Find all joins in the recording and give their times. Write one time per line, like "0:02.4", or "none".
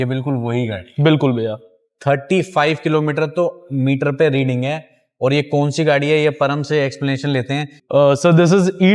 none